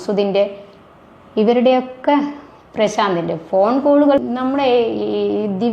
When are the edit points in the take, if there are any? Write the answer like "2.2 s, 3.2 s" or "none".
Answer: 4.2 s